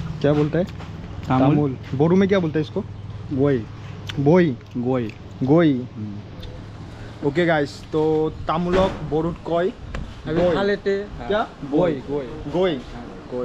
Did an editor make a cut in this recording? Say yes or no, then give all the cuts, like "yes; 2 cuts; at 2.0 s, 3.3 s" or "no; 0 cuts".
no; 0 cuts